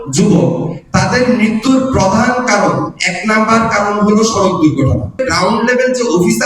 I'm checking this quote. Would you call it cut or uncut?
cut